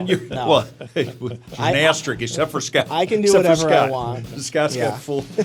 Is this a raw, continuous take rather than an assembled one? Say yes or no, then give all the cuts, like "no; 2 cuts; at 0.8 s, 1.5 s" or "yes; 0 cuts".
yes; 0 cuts